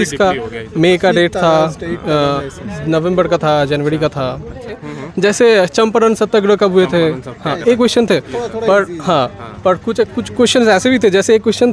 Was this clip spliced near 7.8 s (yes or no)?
no